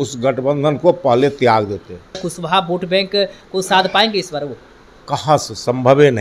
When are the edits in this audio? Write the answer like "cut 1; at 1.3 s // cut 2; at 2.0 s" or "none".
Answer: cut 1; at 2.3 s